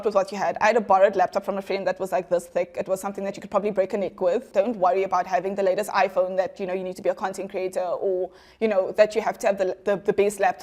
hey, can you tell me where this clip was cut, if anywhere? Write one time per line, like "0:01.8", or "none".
0:04.5